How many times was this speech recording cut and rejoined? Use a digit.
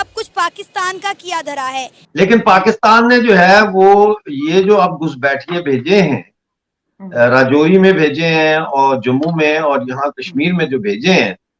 1